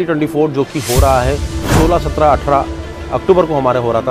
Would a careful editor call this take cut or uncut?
uncut